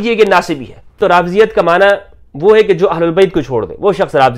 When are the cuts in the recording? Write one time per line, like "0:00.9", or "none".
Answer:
0:01.0